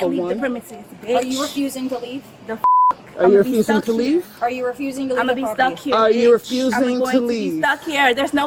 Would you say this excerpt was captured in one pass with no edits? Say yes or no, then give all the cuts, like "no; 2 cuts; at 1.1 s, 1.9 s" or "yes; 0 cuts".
yes; 0 cuts